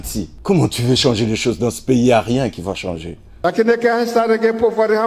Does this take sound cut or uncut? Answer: uncut